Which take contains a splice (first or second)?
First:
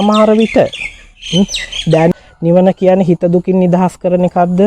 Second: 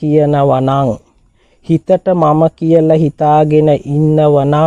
first